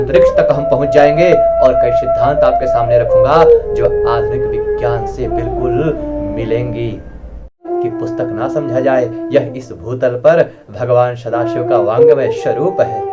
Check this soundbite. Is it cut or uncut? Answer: cut